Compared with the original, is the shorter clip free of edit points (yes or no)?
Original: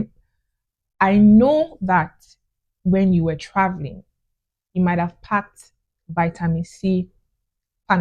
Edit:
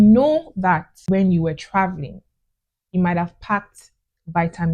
no